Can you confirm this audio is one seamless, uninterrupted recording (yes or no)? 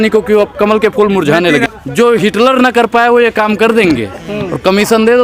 no